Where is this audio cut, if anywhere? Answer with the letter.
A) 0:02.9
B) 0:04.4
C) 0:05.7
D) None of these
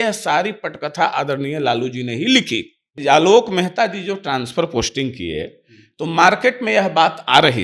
A